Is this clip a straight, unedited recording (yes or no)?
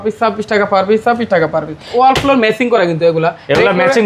no